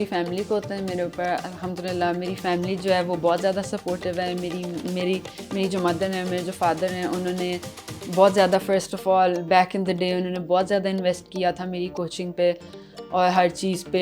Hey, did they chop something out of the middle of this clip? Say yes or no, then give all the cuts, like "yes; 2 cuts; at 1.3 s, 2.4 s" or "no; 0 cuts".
no; 0 cuts